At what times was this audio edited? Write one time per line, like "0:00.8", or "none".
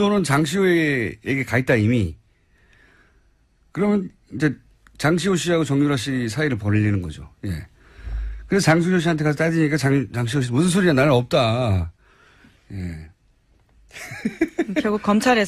none